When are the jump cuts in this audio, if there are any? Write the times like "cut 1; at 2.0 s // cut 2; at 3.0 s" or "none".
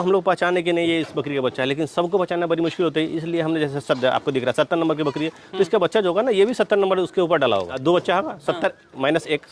cut 1; at 7.7 s